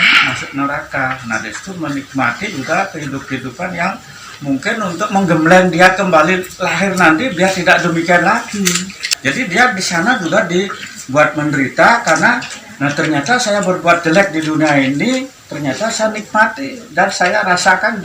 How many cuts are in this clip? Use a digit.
1